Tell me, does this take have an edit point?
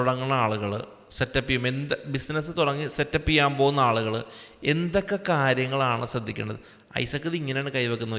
no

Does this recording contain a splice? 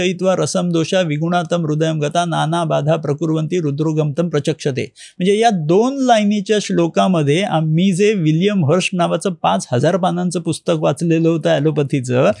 no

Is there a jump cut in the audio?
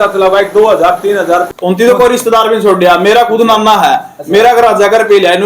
yes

